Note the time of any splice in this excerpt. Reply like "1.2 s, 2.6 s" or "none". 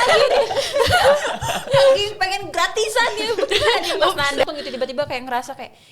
4.4 s